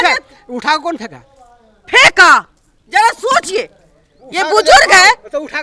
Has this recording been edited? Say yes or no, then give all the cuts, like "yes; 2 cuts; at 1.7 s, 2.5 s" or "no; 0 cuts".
no; 0 cuts